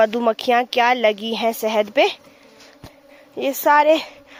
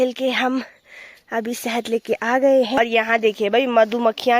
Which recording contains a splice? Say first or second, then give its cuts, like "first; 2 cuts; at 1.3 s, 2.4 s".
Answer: second; 1 cut; at 2.8 s